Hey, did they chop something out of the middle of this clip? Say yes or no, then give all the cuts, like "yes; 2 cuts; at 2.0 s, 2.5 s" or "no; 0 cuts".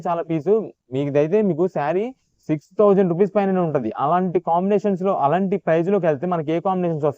no; 0 cuts